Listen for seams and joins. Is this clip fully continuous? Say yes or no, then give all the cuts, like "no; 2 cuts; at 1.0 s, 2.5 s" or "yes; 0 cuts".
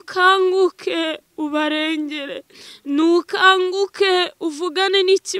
yes; 0 cuts